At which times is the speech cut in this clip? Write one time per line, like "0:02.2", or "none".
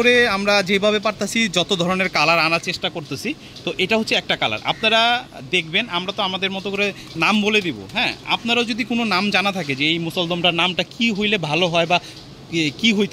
none